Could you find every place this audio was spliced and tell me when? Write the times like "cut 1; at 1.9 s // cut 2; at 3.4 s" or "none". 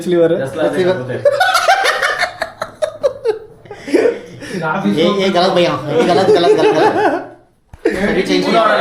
none